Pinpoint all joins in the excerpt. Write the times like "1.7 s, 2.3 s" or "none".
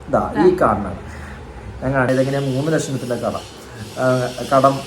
2.1 s